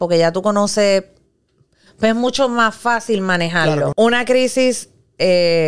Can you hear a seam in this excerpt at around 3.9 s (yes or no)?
yes